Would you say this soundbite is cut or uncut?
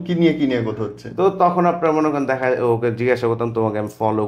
uncut